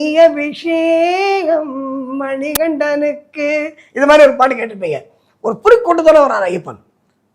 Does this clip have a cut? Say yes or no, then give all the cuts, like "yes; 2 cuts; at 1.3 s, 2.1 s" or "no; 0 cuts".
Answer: no; 0 cuts